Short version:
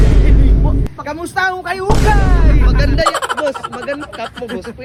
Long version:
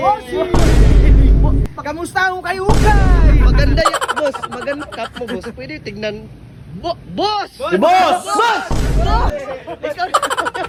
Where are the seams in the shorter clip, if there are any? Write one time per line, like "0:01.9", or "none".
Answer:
none

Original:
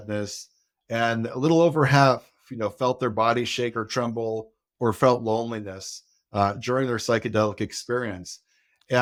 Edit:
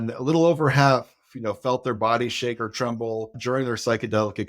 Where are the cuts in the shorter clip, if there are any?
0:03.4

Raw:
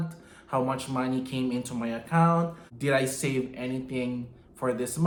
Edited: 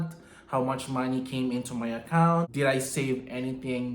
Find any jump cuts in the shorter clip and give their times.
0:02.5

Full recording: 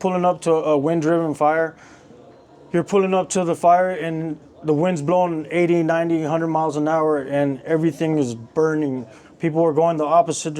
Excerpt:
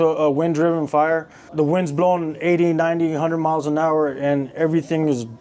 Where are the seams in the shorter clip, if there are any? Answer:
0:01.4

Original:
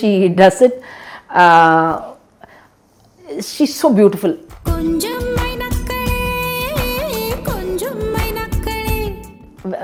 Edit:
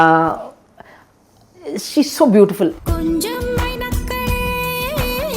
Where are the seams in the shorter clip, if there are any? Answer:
0:02.8

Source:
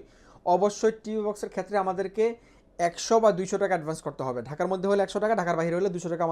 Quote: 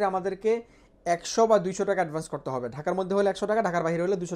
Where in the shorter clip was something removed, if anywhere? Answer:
none

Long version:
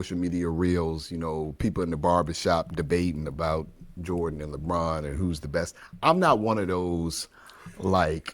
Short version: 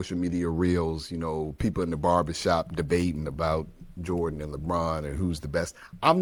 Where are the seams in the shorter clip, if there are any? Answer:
none

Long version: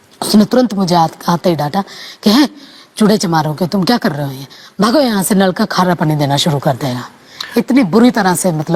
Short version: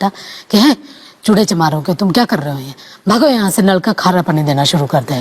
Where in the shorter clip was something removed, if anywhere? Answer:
none

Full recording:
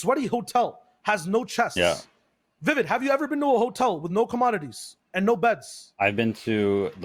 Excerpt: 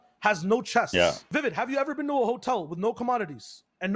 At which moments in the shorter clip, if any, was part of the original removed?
0:01.2

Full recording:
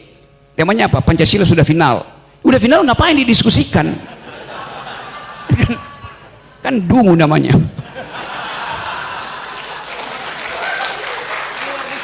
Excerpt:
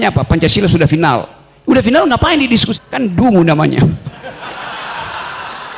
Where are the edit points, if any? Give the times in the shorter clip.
0:02.7

